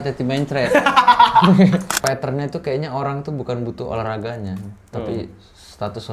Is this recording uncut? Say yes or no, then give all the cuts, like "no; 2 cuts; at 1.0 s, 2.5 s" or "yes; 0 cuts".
no; 1 cut; at 2.0 s